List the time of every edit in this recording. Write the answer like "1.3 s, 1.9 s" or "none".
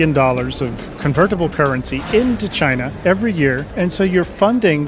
0.9 s, 3.7 s